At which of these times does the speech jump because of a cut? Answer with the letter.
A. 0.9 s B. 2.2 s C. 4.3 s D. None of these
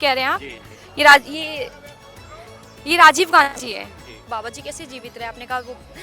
C